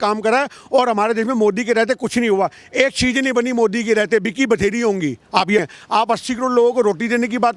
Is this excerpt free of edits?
no; 1 cut; at 5.6 s

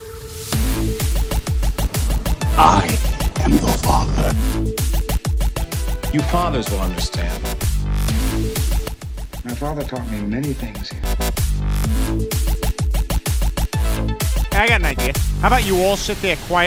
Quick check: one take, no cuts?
yes; 0 cuts

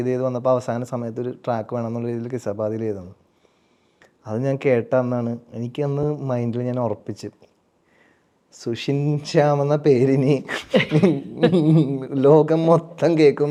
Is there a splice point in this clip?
no; 0 cuts

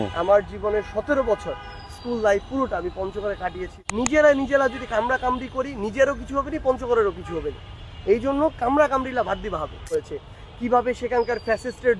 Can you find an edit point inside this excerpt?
yes; 2 cuts; at 3.7 s, 9.9 s

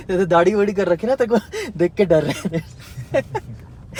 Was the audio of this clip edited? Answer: no; 0 cuts

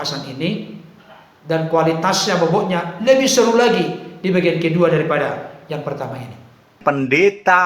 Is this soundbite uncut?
no; 1 cut; at 6.8 s

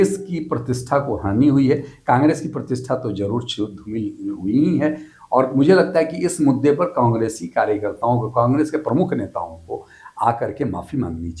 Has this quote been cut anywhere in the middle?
no; 0 cuts

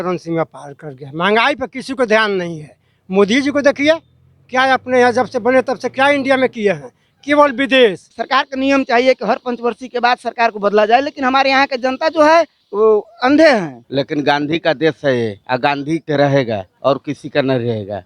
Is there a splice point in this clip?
yes; 2 cuts; at 8.1 s, 13.8 s

